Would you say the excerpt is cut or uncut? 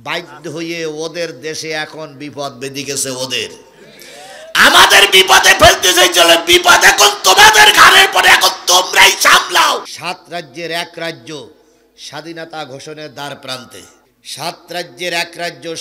cut